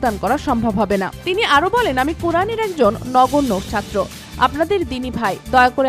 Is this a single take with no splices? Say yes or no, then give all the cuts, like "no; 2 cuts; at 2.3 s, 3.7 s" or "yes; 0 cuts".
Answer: yes; 0 cuts